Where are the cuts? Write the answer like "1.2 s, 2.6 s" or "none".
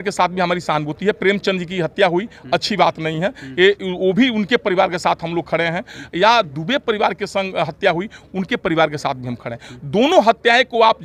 none